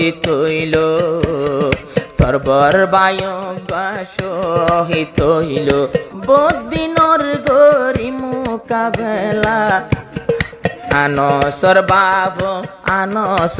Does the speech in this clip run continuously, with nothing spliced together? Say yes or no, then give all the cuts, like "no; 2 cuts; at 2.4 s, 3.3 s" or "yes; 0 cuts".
no; 1 cut; at 6.1 s